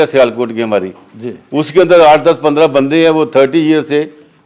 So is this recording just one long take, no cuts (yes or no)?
yes